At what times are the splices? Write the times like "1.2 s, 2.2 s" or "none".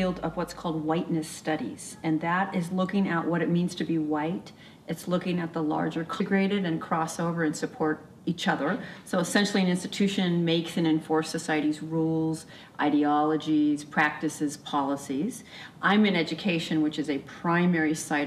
none

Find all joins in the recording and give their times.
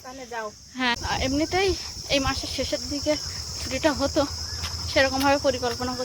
1.0 s

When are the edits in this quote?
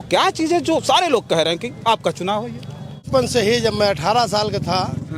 3.0 s

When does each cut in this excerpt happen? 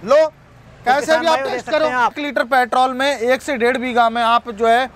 2.2 s

